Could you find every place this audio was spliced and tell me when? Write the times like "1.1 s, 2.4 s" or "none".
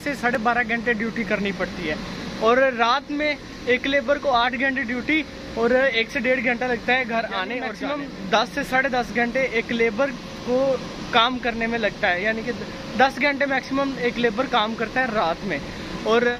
7.7 s